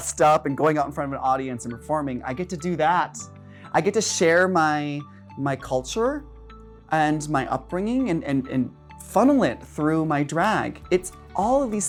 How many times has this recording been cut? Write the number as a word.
zero